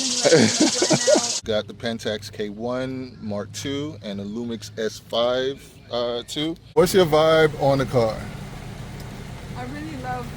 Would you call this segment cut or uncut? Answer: cut